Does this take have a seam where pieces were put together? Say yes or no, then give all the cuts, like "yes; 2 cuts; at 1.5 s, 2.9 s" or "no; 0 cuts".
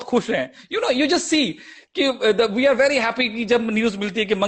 no; 0 cuts